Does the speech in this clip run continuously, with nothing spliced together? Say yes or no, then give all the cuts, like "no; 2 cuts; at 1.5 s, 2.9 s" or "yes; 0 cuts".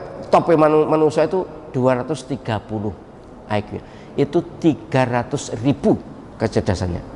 no; 1 cut; at 6.2 s